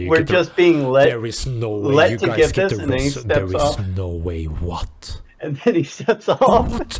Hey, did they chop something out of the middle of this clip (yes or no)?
no